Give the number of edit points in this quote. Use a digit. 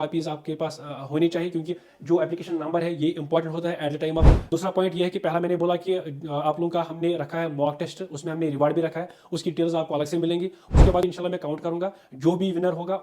2